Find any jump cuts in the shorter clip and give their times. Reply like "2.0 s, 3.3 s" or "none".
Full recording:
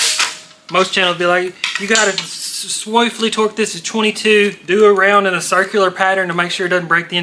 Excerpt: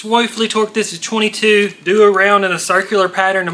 none